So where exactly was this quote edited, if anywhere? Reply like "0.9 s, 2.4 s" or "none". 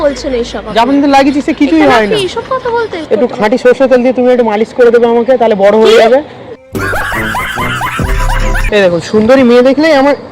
3.0 s, 8.6 s